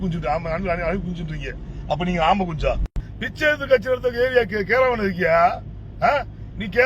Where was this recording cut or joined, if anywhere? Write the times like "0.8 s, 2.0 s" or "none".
3.0 s